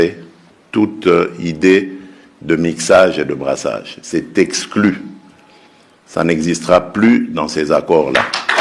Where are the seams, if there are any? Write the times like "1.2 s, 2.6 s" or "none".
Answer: none